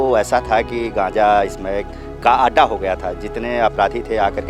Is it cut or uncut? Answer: uncut